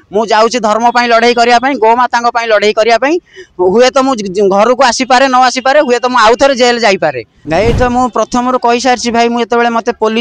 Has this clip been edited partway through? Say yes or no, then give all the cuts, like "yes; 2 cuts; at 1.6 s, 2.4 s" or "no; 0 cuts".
yes; 1 cut; at 7.3 s